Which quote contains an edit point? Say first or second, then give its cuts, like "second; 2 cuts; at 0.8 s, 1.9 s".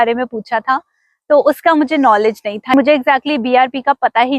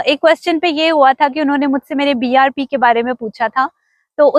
first; 1 cut; at 2.7 s